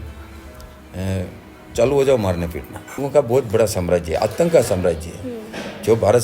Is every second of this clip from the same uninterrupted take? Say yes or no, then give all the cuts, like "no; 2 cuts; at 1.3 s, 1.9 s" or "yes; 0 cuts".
no; 1 cut; at 3.0 s